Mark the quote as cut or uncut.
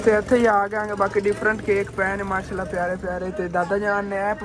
uncut